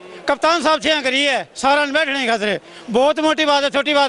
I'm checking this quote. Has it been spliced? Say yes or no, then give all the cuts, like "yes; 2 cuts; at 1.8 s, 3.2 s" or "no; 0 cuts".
no; 0 cuts